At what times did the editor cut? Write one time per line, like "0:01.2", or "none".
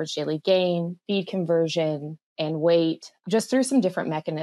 0:03.1